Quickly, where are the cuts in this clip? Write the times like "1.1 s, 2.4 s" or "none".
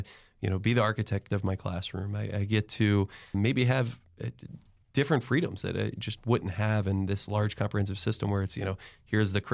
none